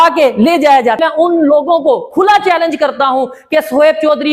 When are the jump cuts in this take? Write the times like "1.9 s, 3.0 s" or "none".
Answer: 1.0 s